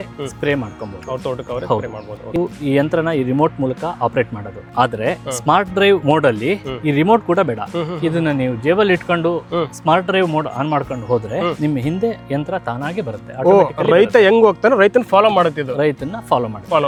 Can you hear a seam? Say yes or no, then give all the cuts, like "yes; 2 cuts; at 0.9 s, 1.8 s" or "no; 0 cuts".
no; 0 cuts